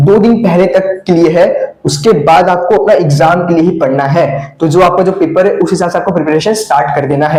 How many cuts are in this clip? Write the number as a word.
zero